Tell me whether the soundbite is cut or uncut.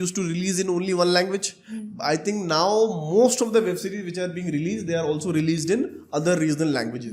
uncut